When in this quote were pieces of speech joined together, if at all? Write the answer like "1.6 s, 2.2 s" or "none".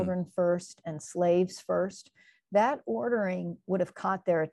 none